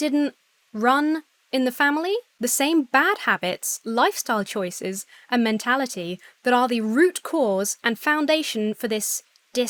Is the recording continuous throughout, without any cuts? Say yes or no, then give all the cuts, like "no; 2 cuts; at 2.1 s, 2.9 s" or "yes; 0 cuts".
yes; 0 cuts